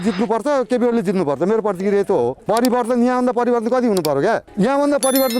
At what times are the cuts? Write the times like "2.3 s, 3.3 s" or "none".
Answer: 2.4 s